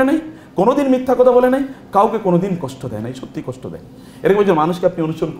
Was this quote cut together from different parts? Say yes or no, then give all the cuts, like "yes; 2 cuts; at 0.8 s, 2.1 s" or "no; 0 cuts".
no; 0 cuts